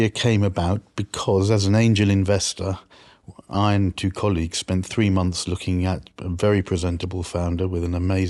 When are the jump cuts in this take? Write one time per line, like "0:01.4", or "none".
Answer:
none